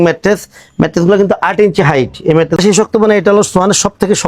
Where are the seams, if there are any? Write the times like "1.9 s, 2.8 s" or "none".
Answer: 2.6 s